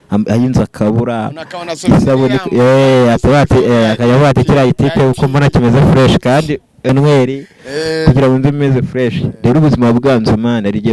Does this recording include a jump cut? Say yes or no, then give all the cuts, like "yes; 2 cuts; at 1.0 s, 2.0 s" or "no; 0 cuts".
yes; 1 cut; at 6.9 s